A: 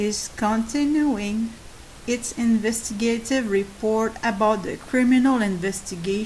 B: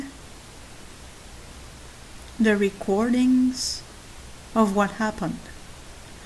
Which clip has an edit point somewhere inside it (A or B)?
A